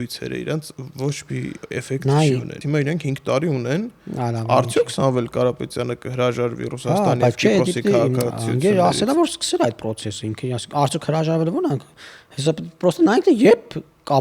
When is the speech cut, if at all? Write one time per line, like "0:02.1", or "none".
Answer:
0:02.6